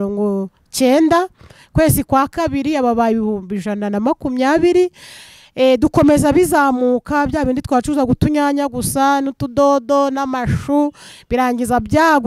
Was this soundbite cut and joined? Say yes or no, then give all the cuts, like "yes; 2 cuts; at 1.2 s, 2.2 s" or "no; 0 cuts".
no; 0 cuts